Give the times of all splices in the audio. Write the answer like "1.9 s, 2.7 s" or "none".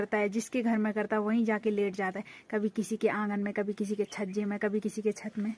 none